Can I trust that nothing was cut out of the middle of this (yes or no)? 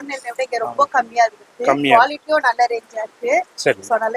yes